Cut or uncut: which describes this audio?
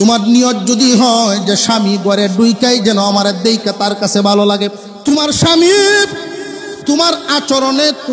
cut